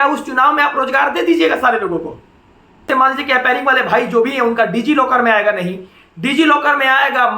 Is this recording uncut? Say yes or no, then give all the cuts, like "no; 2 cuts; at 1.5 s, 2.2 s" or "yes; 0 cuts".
no; 1 cut; at 2.9 s